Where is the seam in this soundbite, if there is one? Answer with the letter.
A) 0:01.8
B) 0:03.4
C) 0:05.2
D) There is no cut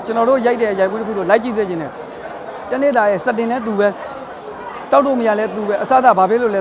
D